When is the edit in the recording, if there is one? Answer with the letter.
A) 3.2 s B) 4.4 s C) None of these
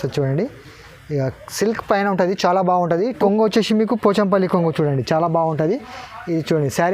A